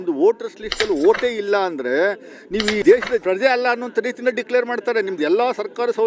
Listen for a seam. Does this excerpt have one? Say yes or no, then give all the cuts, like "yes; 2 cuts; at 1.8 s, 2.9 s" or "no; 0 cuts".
no; 0 cuts